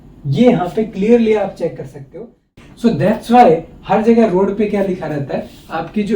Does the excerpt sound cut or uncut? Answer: cut